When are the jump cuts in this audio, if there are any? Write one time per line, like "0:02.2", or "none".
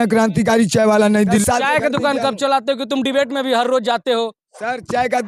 0:01.4